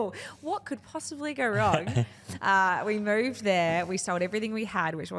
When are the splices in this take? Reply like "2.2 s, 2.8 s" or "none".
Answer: none